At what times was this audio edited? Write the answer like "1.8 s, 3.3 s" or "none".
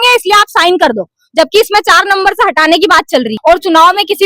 3.3 s